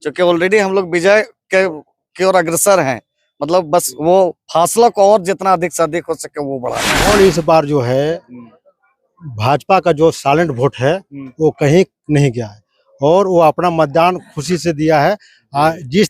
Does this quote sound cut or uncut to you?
cut